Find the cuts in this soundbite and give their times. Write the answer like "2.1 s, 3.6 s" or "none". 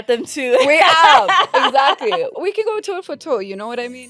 2.4 s